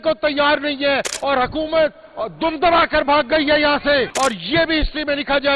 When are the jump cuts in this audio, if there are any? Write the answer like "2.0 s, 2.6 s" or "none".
4.1 s